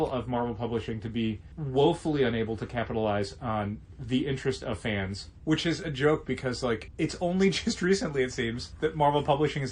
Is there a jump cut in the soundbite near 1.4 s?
no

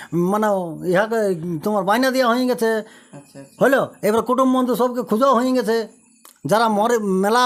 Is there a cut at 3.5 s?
no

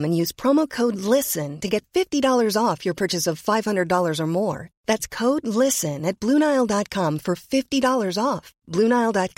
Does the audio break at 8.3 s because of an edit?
no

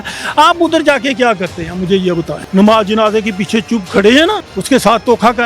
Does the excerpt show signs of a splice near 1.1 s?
no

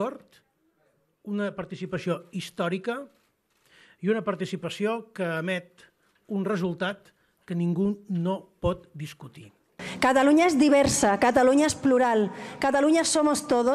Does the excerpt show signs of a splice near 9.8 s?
yes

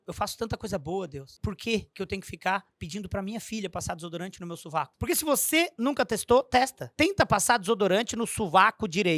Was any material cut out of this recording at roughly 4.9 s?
yes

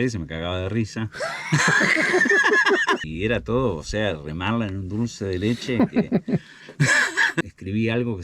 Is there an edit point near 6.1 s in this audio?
no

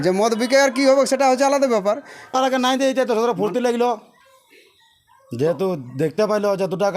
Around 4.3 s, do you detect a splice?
no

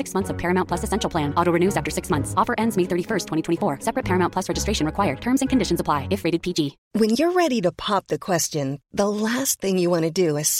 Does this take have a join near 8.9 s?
no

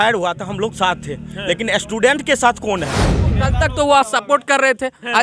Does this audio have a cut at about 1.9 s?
no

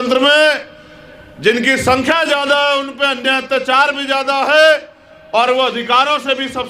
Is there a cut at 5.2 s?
no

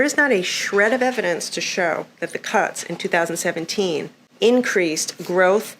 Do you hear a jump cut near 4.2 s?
yes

